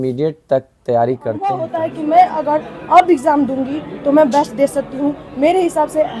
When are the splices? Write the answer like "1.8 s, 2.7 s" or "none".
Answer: 1.7 s